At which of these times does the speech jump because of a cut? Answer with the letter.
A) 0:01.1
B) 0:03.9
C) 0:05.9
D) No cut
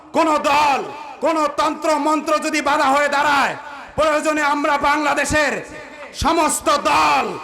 C